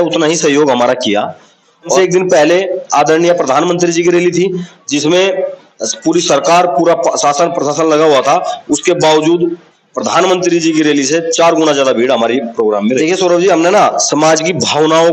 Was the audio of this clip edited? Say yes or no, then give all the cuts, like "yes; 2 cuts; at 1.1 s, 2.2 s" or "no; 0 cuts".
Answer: yes; 2 cuts; at 2.0 s, 13.0 s